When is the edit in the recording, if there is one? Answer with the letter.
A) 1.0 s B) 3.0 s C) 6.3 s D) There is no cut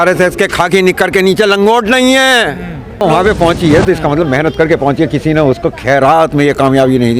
B